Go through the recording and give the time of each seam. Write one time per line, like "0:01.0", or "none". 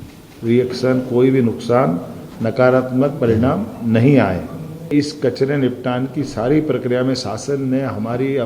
0:04.9